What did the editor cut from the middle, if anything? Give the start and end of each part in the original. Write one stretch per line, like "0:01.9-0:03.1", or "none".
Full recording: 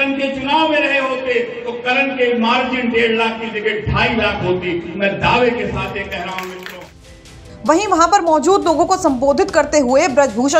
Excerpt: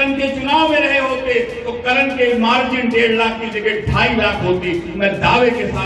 none

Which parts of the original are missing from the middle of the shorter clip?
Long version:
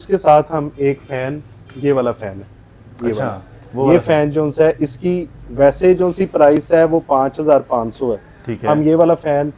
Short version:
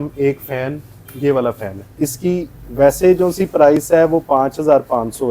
0:02.6-0:04.8

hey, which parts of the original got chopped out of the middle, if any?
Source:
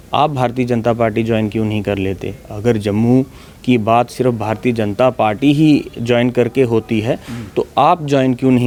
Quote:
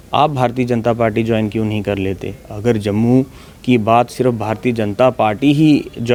none

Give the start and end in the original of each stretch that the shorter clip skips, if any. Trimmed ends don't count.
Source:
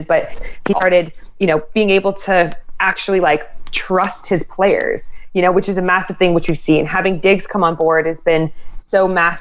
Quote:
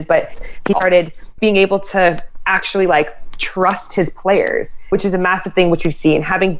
0:01.3-0:01.7
0:05.2-0:05.5

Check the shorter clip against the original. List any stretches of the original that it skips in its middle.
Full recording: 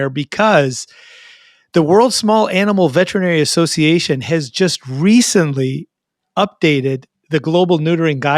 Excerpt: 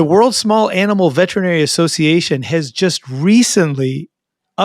none

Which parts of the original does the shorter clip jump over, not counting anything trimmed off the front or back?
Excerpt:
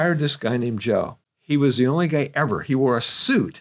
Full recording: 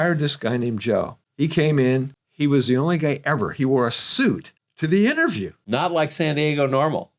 0:01.2-0:02.1

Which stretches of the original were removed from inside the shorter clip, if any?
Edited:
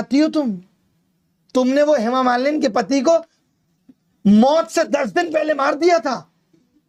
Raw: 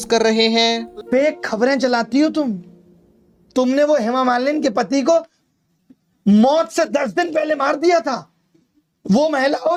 none

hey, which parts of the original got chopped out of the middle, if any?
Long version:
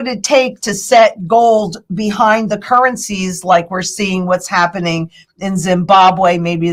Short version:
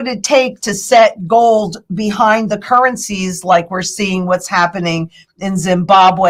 none

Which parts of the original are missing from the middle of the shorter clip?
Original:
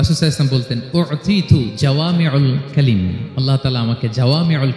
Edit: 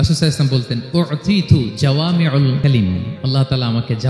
0:02.6-0:02.7

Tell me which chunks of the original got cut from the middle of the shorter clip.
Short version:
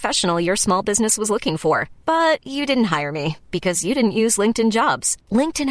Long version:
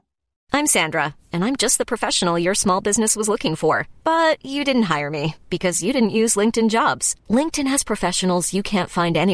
none

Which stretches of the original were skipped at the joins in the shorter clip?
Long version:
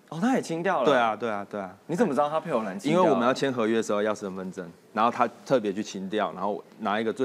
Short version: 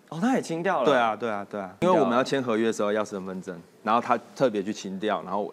0:01.8-0:02.9

